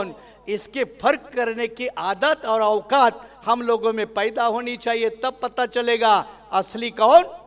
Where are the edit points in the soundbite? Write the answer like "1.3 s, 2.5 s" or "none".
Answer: none